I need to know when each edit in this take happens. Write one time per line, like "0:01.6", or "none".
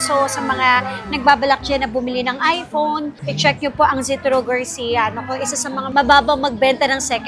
none